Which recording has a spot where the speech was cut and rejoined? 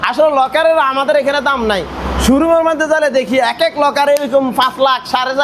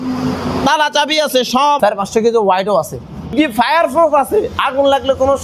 second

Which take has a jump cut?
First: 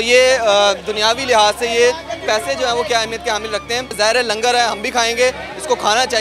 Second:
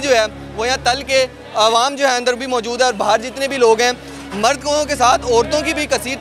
first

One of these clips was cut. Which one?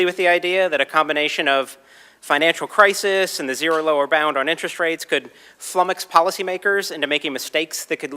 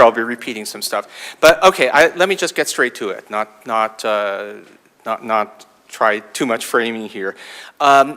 second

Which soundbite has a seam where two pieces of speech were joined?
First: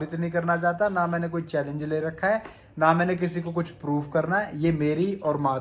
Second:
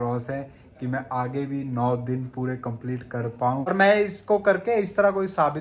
second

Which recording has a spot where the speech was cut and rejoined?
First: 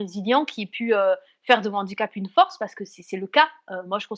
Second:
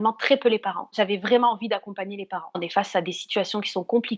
second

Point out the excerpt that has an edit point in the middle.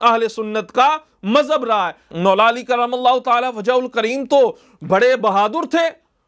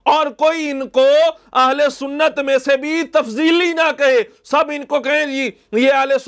first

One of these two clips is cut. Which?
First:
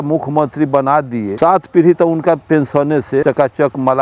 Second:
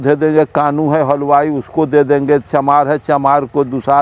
first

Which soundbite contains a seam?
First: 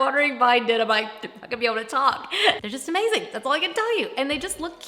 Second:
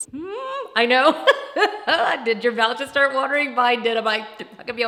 first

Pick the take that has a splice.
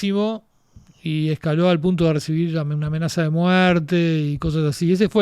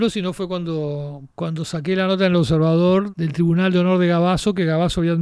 second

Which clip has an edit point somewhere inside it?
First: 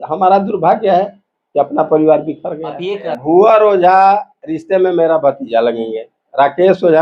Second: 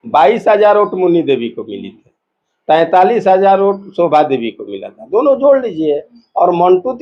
first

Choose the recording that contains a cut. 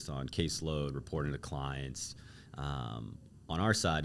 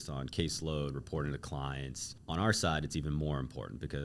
second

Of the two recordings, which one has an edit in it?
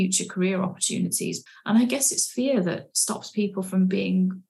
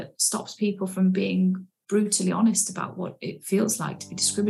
first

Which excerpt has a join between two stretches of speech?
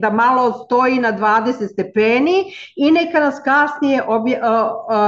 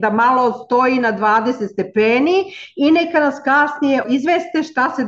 second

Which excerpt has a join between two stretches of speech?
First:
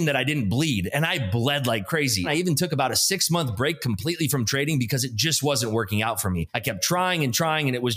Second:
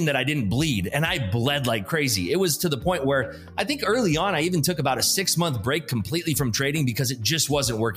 first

